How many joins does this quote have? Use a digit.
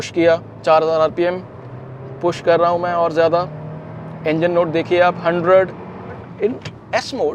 1